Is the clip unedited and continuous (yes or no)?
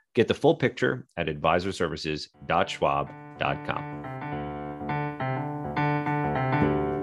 no